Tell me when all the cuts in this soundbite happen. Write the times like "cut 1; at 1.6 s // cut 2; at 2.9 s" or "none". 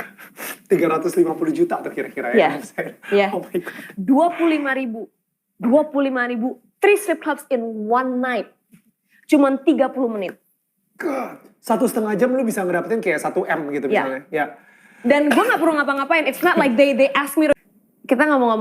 cut 1; at 17.5 s

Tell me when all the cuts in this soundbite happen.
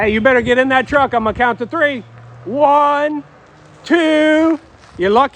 none

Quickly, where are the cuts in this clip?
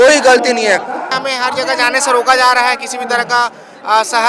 cut 1; at 1.1 s

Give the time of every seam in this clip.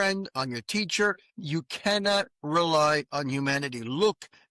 cut 1; at 1.3 s

